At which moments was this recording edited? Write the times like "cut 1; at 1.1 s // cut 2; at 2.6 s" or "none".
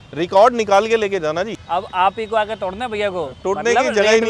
cut 1; at 1.6 s

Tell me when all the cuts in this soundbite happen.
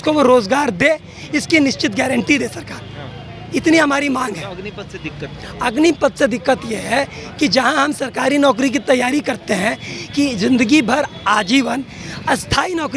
none

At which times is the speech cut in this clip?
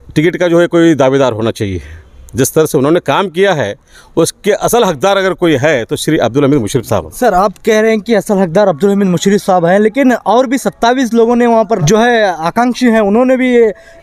none

